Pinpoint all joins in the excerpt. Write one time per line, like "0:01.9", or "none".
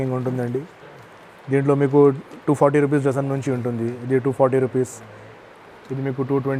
none